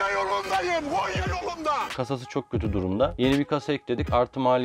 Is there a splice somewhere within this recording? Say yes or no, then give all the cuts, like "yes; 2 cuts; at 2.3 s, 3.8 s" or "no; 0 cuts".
yes; 2 cuts; at 1.9 s, 3.1 s